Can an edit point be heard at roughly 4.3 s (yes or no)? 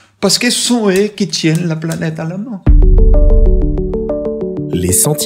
no